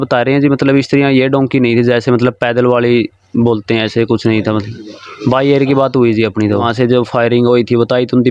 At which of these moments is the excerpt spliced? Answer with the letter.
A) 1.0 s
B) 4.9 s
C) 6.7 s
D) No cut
C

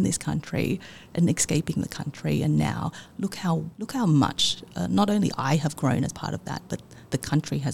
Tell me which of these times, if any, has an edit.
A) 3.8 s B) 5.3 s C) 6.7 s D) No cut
A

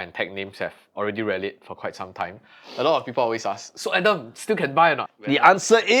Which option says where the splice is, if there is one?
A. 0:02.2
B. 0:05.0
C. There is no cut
B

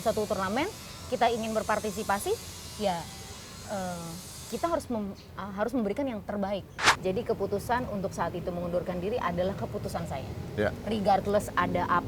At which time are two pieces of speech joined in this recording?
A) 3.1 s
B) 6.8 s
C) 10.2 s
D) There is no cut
B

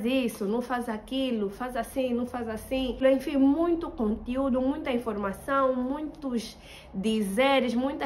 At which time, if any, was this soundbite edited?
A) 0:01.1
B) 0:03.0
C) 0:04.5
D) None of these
B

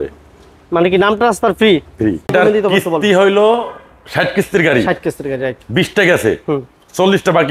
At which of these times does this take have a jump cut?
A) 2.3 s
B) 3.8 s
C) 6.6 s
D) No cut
A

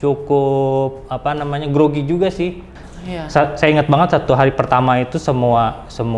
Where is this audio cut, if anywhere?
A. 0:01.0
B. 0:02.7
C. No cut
B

